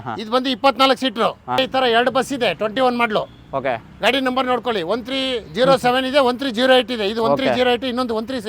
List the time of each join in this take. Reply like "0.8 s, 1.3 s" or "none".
1.6 s